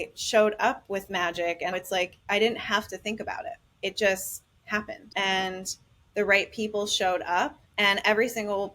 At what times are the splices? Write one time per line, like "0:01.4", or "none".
0:01.7
0:03.7
0:05.0
0:07.6